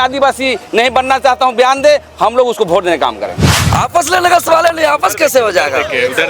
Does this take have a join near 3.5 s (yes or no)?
yes